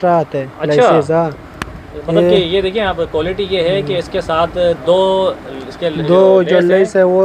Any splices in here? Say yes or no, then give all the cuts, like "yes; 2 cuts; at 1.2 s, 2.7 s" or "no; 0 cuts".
no; 0 cuts